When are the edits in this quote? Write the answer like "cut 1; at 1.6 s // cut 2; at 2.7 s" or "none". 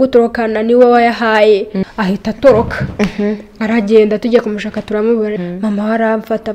cut 1; at 1.8 s // cut 2; at 5.4 s